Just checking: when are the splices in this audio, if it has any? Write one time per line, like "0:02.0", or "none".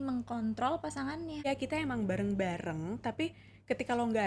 0:01.4